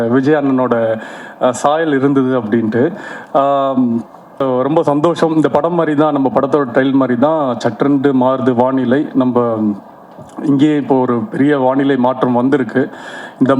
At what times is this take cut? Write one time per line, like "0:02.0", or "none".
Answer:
0:04.3